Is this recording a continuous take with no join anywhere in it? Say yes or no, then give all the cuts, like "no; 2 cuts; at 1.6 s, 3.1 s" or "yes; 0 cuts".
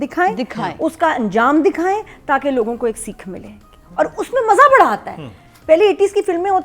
yes; 0 cuts